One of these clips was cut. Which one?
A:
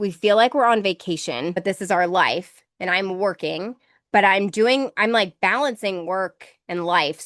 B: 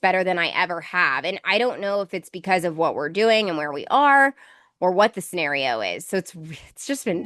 A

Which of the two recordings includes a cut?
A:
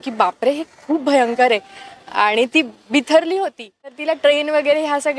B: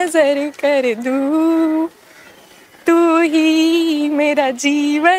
A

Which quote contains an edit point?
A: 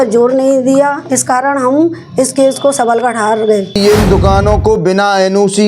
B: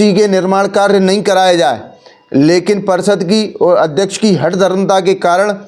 A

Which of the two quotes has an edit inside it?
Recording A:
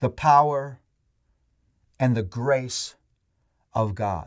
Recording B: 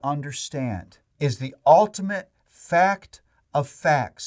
B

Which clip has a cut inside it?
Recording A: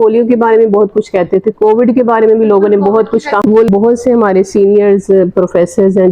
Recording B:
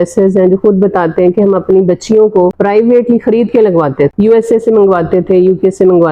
A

